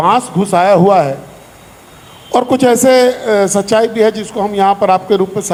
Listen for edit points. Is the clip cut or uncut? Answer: uncut